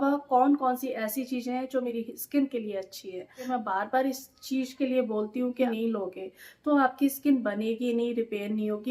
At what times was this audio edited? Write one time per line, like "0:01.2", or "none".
0:01.9
0:03.5
0:05.7

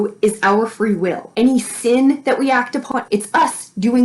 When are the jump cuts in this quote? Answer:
0:02.9

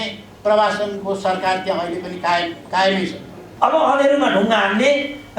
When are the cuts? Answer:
0:03.4

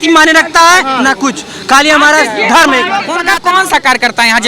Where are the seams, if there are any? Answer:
0:03.1

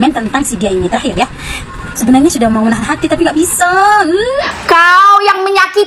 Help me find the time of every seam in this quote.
0:04.5

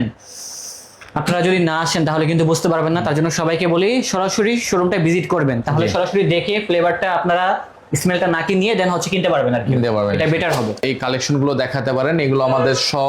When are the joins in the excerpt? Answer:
0:10.8

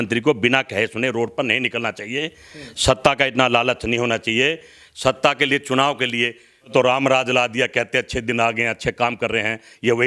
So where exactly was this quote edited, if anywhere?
0:06.7

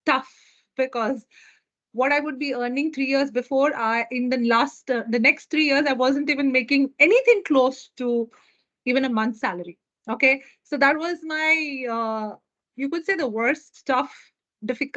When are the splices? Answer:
none

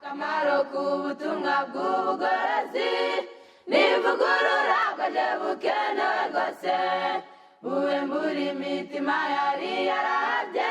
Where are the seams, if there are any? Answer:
0:04.9
0:07.0

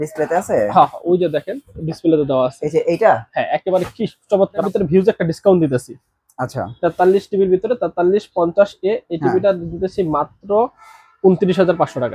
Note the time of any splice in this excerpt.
0:04.6

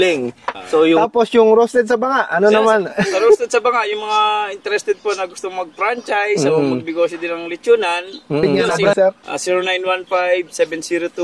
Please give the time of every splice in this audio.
0:01.0
0:09.0

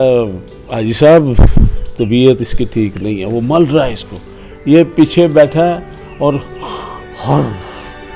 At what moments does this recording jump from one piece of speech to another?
none

